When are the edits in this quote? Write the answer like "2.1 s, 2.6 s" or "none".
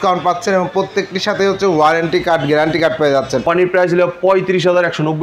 3.4 s